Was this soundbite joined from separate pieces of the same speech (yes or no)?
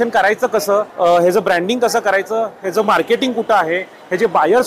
no